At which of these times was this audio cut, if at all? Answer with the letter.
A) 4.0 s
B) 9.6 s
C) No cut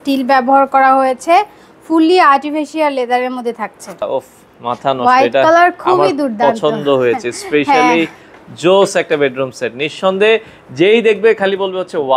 A